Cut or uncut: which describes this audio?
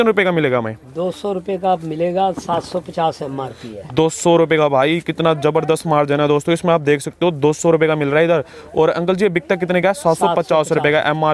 uncut